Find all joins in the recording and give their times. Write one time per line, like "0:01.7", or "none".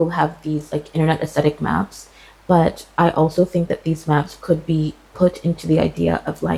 none

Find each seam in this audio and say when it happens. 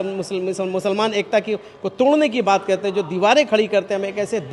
none

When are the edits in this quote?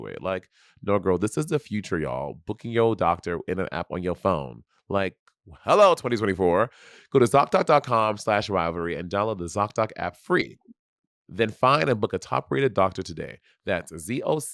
none

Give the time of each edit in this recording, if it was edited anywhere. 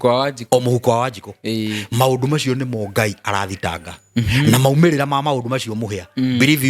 none

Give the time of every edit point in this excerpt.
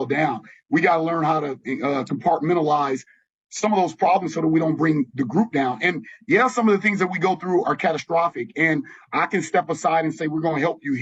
none

